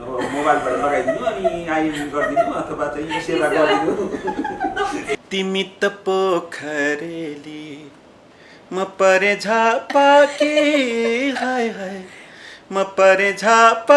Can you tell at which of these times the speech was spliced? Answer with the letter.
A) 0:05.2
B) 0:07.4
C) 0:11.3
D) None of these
A